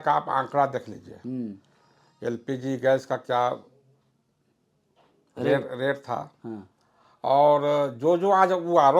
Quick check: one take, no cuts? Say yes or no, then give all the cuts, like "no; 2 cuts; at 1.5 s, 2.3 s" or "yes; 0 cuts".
yes; 0 cuts